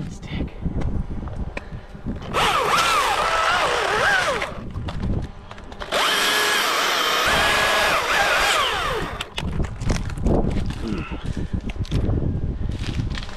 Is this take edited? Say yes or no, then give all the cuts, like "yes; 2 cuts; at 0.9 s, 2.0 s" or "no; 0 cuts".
yes; 1 cut; at 7.3 s